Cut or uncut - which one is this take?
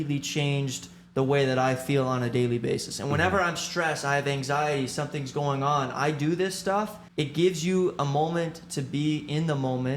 cut